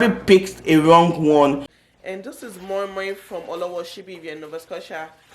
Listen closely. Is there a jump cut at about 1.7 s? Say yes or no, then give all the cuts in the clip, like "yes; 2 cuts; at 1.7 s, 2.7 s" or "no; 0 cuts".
yes; 1 cut; at 1.7 s